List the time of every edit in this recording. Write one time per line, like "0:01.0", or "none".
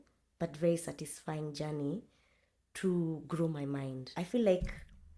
0:04.0